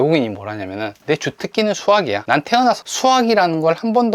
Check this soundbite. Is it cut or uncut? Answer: cut